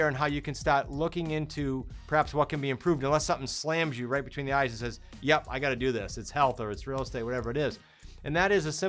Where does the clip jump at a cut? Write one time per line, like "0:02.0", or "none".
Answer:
none